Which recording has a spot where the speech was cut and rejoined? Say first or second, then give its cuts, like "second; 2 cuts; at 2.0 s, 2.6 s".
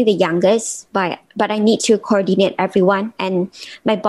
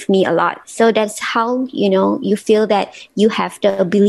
first; 1 cut; at 3.1 s